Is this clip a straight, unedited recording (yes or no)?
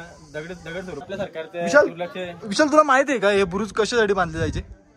no